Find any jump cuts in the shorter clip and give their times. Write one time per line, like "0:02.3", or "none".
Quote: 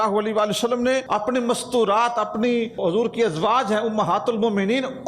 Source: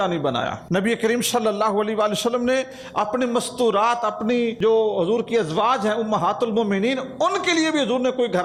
0:01.0
0:02.8